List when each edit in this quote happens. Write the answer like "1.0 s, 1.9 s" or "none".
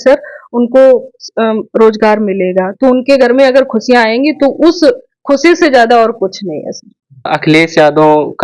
7.3 s